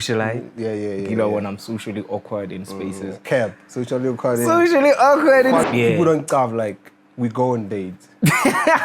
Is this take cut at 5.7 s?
yes; 1 cut; at 5.7 s

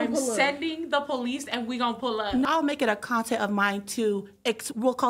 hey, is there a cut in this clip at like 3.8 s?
no; 1 cut; at 2.5 s

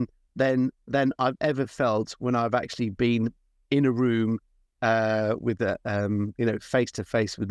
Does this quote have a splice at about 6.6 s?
no; 0 cuts

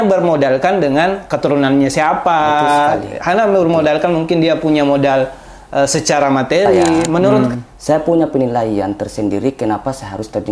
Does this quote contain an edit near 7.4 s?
yes; 1 cut; at 7.4 s

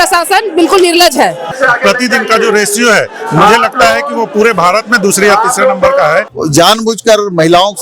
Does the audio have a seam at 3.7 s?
no; 2 cuts; at 1.5 s, 6.3 s

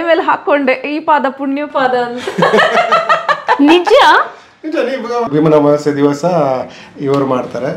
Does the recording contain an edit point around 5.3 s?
yes; 1 cut; at 5.3 s

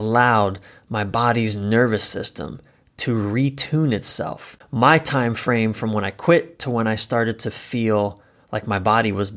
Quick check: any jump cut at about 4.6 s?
yes; 1 cut; at 4.6 s

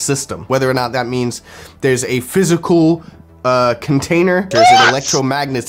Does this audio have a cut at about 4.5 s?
yes; 1 cut; at 4.5 s

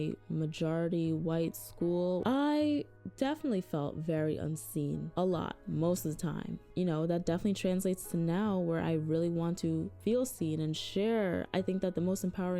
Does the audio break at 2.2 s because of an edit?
yes; 1 cut; at 2.2 s

